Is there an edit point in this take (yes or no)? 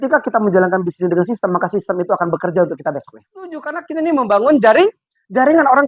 yes